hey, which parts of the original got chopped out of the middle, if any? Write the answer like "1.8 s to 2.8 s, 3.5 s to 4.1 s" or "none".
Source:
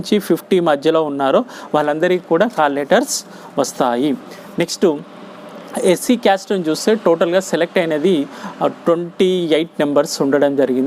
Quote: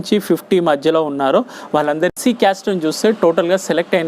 2.1 s to 5.9 s